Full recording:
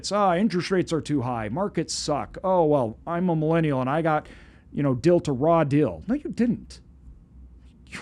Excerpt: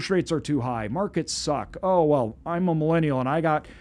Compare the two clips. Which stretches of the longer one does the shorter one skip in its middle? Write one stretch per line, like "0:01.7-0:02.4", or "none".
none